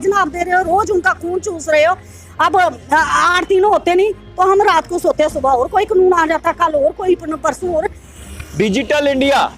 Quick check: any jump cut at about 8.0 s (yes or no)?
yes